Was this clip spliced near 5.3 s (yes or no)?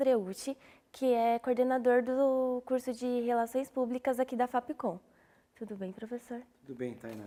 no